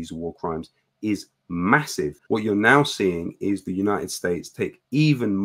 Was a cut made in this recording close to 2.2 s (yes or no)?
yes